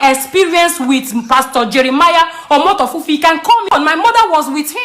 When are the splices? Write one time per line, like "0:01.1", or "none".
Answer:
0:03.7